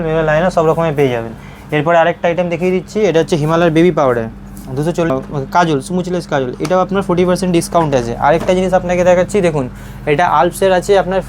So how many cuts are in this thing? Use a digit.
1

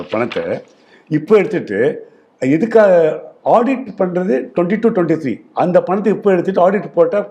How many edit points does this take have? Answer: 0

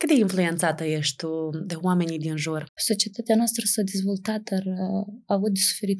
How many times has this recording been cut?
1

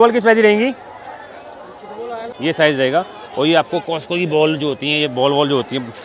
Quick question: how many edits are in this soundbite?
1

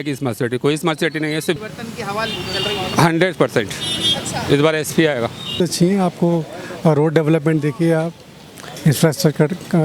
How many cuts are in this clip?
2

